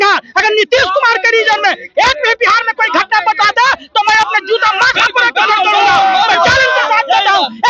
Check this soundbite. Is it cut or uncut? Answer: uncut